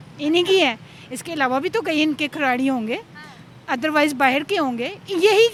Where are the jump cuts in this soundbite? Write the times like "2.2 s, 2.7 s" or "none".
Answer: none

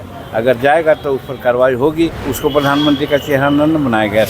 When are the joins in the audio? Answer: 2.2 s

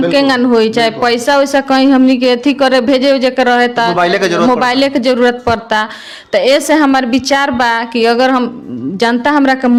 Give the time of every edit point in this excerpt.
none

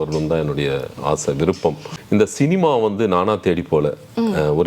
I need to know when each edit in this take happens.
1.9 s

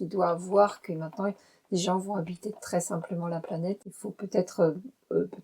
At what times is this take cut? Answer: 3.8 s

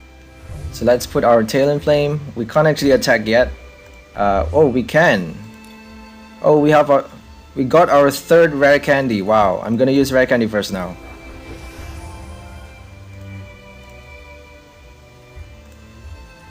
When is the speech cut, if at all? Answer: none

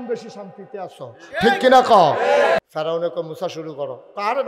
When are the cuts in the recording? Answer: 2.6 s

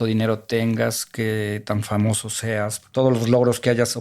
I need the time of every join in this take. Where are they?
2.9 s

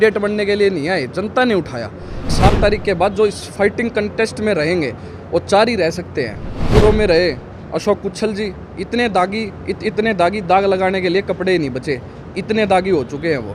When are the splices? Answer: 2.3 s, 6.6 s

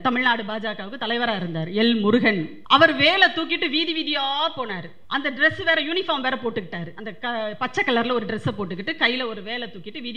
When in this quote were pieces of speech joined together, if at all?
2.5 s, 4.9 s

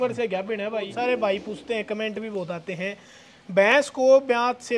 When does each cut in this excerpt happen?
0.9 s

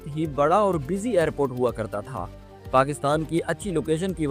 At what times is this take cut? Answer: none

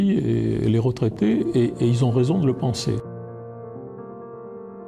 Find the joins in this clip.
3.1 s

